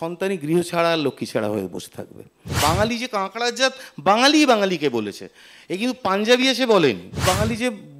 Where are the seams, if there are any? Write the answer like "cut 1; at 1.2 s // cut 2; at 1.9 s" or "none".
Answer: cut 1; at 2.5 s // cut 2; at 7.1 s